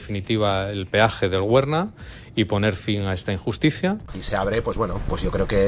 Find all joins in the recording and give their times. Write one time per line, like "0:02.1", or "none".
0:04.1